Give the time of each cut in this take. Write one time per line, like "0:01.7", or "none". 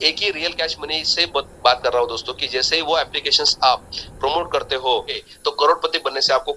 0:05.2